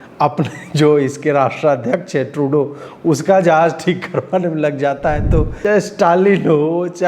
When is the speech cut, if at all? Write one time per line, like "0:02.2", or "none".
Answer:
0:05.5